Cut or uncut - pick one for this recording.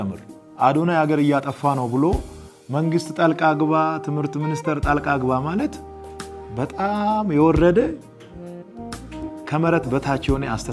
uncut